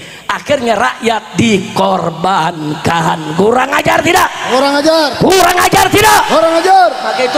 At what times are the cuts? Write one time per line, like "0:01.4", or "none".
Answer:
none